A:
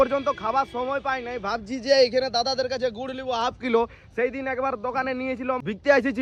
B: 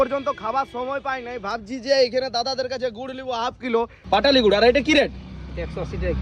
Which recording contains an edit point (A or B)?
B